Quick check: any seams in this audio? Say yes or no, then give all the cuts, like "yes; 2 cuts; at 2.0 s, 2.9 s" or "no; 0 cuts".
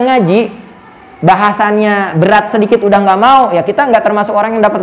no; 0 cuts